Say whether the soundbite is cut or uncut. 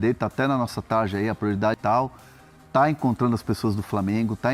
cut